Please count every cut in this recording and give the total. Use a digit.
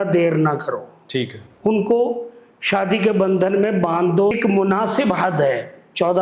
1